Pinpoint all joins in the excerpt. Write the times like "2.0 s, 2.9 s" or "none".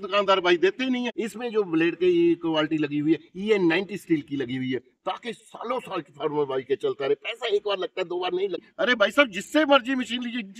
1.2 s, 8.6 s

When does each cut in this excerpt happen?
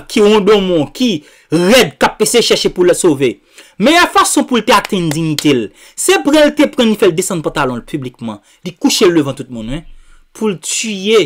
none

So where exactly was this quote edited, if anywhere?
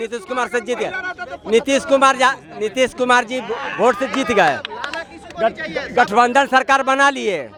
none

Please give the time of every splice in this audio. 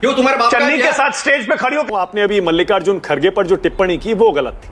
1.9 s

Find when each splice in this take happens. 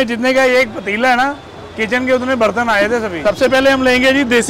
3.1 s

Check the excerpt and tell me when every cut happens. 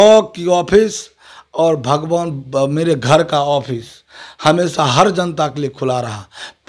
none

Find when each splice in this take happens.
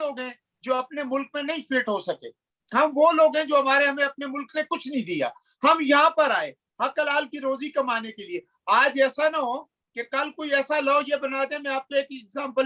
none

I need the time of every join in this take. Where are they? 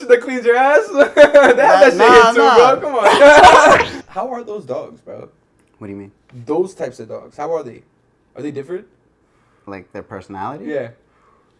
4.0 s

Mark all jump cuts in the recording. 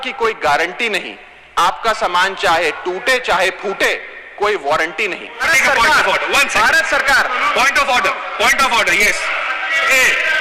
5.5 s

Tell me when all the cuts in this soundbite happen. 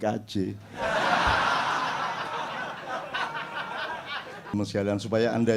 4.5 s

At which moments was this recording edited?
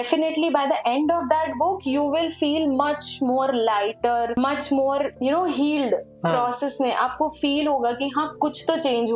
none

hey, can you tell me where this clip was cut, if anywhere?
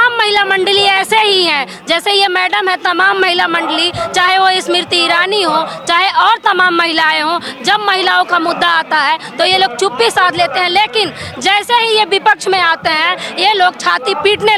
none

